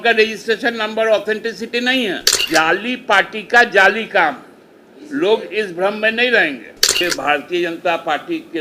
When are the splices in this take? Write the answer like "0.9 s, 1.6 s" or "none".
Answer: 2.3 s, 7.0 s